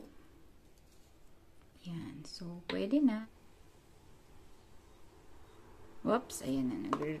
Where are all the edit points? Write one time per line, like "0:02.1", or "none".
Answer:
0:03.4